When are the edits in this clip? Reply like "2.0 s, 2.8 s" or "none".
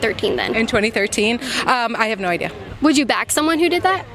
2.6 s